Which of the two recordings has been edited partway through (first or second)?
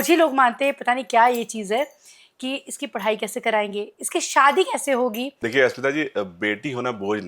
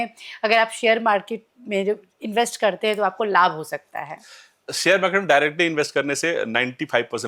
first